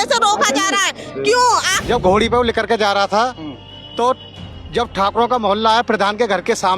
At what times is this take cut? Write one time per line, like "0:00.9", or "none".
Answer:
0:01.7